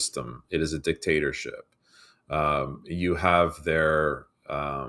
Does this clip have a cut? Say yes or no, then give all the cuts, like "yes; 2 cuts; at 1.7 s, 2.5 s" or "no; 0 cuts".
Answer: no; 0 cuts